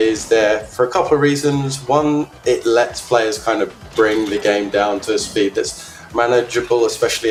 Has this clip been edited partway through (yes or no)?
no